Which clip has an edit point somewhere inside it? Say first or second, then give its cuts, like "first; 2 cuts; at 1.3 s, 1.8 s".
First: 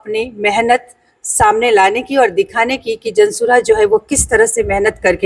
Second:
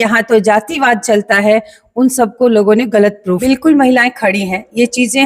second; 1 cut; at 3.4 s